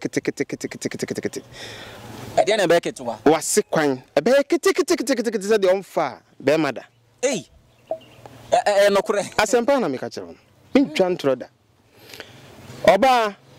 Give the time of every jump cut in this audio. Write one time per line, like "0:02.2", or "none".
none

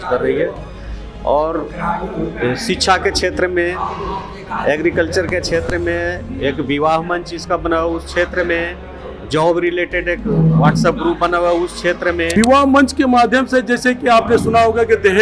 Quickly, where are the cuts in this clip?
0:12.3

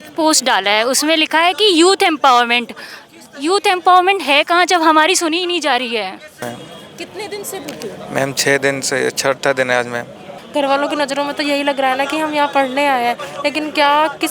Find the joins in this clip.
0:06.4
0:10.3

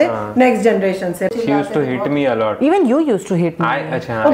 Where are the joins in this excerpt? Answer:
0:01.3

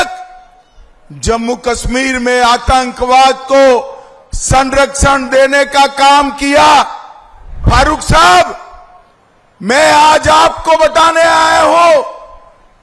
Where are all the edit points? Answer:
0:07.6

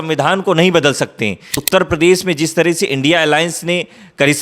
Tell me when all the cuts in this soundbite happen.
0:01.5

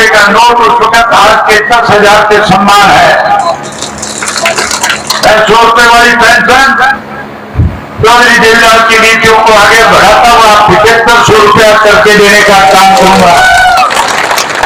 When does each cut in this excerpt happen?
none

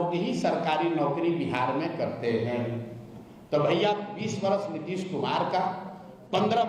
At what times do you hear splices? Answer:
none

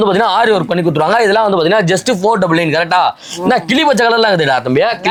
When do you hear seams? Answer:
none

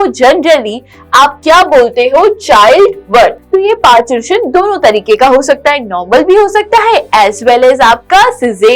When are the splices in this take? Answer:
0:03.4

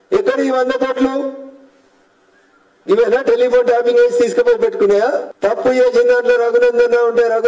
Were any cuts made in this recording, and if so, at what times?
0:05.3

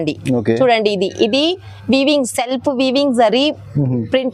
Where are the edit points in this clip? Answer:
none

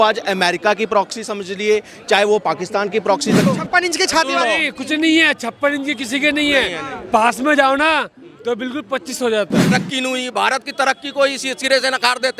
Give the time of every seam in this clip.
0:03.4
0:09.7

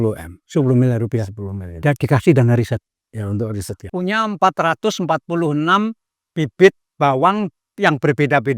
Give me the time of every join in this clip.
0:03.8

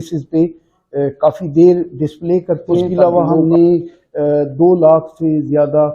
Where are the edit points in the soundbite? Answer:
0:02.9

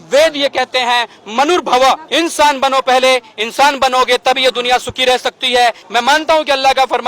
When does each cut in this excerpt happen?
0:02.0
0:05.8

